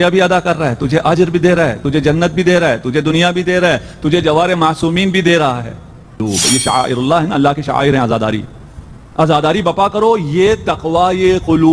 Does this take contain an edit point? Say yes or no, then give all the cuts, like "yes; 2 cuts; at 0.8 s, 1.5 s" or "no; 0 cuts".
yes; 1 cut; at 6.2 s